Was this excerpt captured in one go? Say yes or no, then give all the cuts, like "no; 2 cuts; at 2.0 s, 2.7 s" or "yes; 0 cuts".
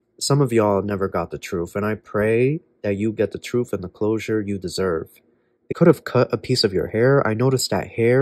no; 1 cut; at 5.7 s